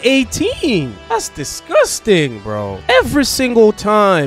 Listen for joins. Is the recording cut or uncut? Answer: cut